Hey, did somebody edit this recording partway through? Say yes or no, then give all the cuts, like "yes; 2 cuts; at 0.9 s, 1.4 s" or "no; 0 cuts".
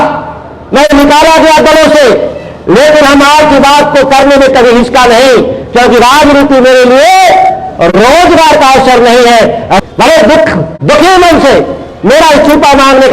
yes; 1 cut; at 9.8 s